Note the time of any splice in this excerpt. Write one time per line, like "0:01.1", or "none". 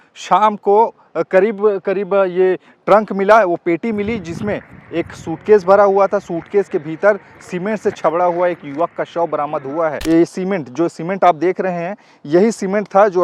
0:10.0